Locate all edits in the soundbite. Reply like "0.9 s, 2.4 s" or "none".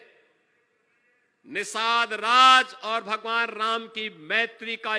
none